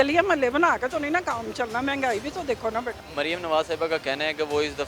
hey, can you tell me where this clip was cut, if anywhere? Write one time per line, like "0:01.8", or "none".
0:03.0

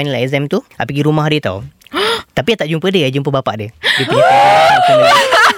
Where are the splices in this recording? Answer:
none

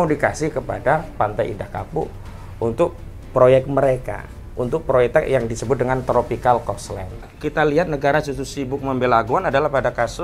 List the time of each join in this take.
0:07.4

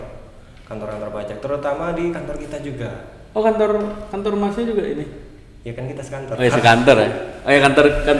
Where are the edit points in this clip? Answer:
none

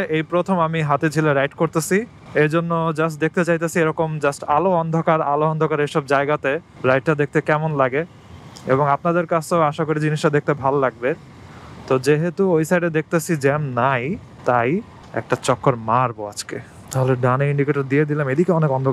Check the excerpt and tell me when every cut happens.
none

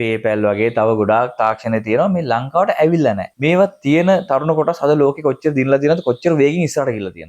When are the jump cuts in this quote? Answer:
0:03.3

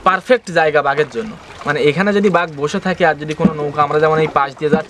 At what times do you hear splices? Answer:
none

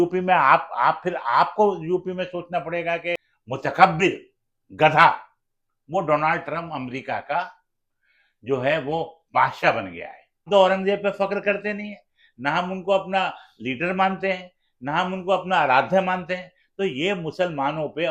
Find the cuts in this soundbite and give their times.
0:03.3
0:10.4

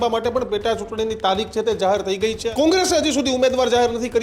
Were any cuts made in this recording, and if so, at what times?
0:02.4

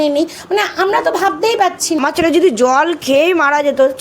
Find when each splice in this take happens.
0:02.0

